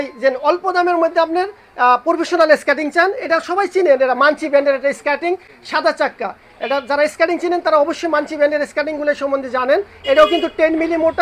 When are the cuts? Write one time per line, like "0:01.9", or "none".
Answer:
none